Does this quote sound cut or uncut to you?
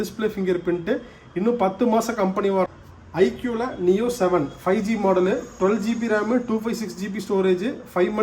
cut